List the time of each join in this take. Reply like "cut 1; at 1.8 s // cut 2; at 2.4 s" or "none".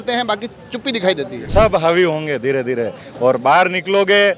cut 1; at 1.5 s